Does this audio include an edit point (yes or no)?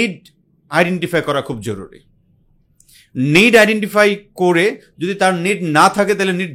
no